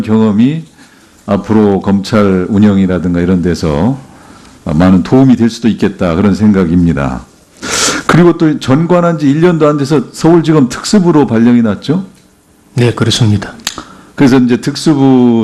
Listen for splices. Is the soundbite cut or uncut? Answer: cut